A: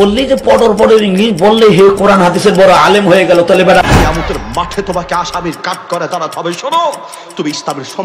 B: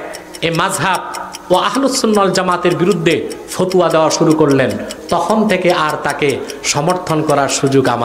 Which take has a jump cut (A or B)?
A